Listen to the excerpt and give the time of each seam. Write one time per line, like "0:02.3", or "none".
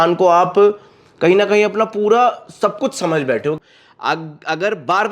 0:03.6

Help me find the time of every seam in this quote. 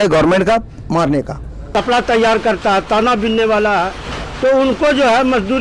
0:01.5

